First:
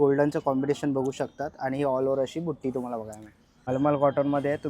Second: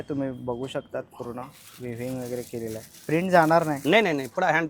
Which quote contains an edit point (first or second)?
first